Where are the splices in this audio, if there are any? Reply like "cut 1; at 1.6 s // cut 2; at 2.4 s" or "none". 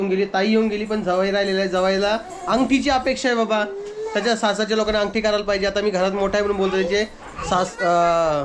none